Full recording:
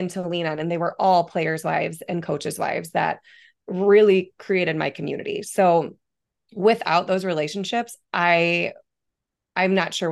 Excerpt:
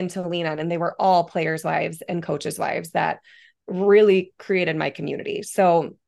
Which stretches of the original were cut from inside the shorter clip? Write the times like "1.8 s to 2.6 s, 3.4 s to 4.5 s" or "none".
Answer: none

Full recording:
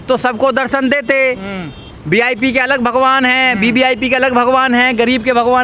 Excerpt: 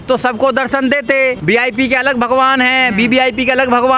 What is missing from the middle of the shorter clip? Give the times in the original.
1.4 s to 2.0 s

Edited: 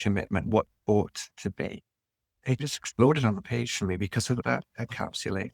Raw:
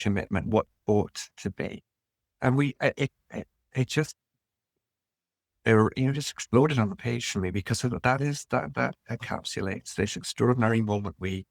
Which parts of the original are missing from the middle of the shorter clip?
2.4 s to 6.0 s, 8.0 s to 8.7 s

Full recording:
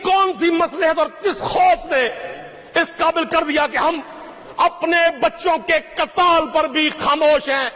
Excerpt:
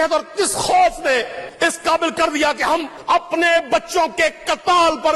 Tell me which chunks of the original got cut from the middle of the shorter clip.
2.3 s to 2.6 s, 4.1 s to 4.4 s

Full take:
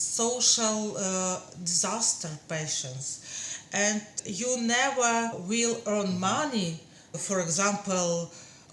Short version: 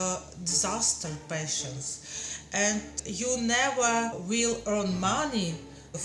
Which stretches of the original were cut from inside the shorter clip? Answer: none

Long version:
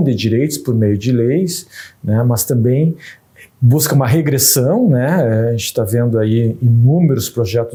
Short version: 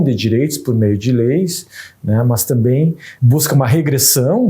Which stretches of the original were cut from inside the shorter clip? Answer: 3.1 s to 3.5 s

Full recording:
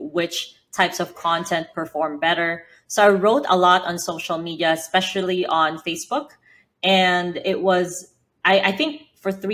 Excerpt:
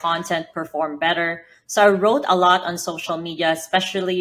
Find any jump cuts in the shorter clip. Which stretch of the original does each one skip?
none

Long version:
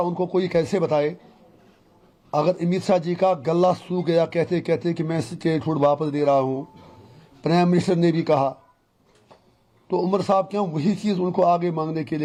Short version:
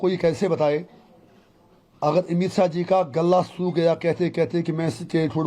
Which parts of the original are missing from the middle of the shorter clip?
none

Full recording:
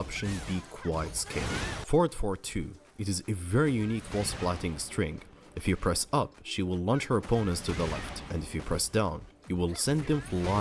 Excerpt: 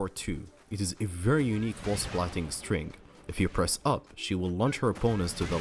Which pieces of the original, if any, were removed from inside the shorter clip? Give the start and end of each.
none

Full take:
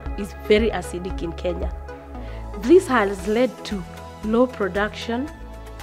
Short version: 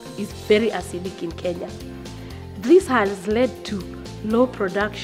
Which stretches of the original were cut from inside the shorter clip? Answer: none

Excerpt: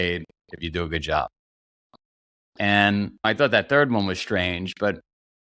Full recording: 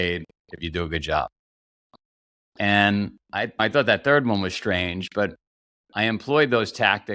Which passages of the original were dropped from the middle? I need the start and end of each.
3.2 s to 3.5 s

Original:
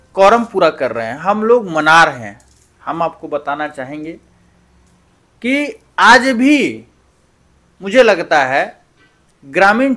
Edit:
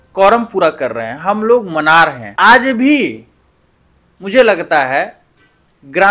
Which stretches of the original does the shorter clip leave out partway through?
2.2 s to 5.8 s

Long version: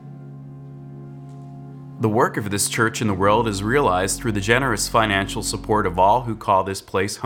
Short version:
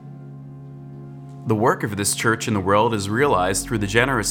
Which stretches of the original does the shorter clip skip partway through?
1.4 s to 2.0 s

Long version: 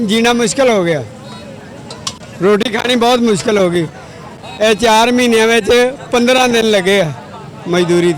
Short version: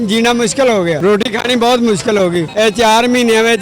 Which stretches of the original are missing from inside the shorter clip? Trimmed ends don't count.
1.0 s to 2.4 s, 3.9 s to 4.5 s

